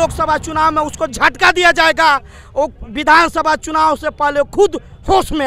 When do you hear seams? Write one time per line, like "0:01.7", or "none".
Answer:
none